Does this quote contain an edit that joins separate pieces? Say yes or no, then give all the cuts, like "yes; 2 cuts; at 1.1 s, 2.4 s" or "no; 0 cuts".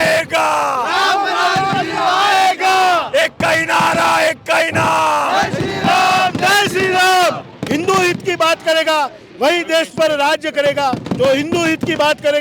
yes; 1 cut; at 7.5 s